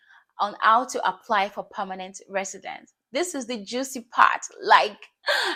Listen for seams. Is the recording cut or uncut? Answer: uncut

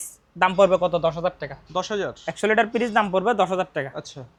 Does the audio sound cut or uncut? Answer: uncut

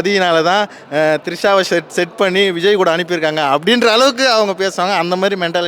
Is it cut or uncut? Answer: uncut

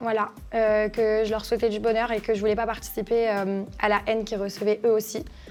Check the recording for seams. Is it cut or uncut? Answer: uncut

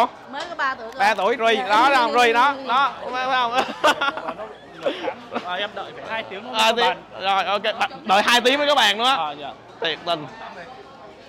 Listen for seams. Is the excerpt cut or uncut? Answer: uncut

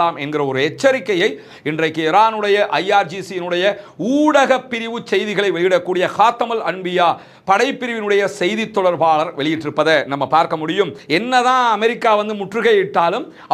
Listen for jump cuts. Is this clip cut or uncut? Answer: cut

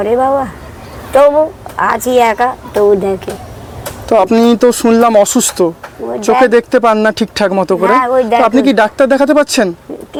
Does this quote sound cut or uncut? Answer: uncut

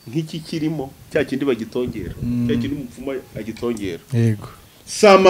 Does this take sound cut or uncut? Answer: uncut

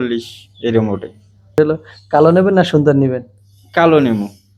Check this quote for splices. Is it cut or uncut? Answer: cut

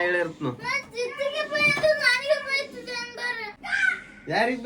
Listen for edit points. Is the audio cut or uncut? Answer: cut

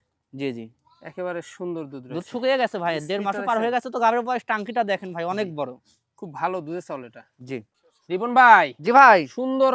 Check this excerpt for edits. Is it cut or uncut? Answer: uncut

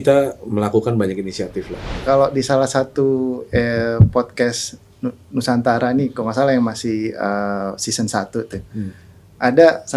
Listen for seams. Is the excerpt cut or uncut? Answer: cut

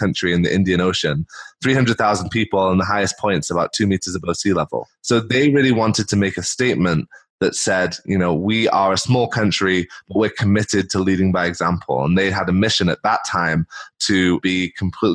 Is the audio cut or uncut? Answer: uncut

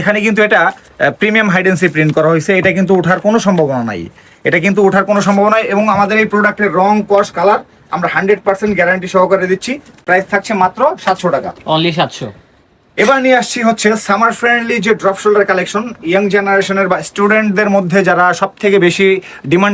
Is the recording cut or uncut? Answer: uncut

